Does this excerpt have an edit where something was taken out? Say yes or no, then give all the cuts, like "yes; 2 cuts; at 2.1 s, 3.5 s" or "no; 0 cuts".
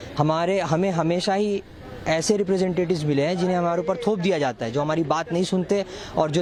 no; 0 cuts